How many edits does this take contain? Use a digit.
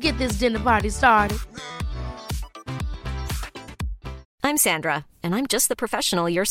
1